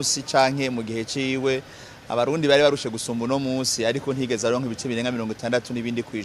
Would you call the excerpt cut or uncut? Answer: uncut